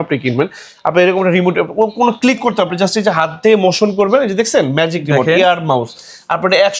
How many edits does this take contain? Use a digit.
0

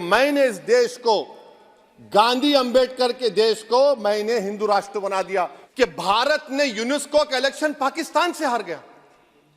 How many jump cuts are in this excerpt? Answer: 1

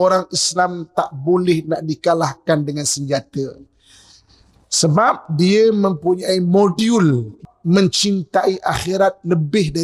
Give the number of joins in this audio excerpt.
1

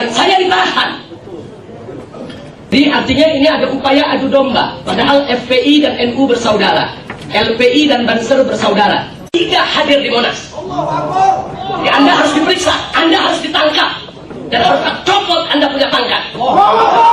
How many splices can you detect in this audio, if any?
2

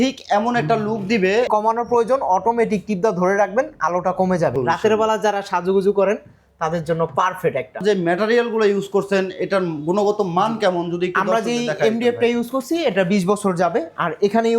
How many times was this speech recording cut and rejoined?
3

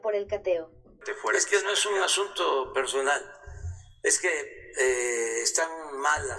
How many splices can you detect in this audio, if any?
1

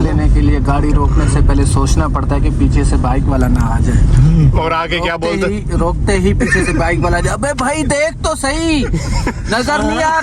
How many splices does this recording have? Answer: 0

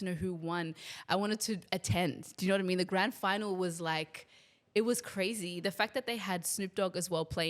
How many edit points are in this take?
0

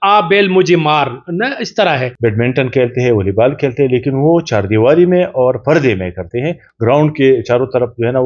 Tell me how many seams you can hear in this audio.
2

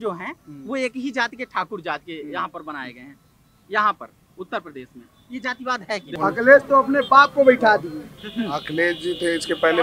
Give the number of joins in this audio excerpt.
1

